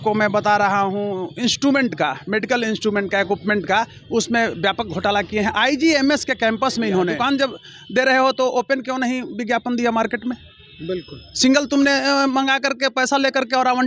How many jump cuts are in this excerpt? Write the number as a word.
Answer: one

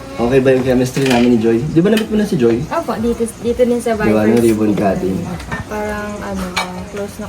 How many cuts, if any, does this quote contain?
one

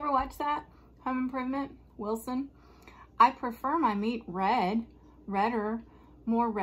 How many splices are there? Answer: zero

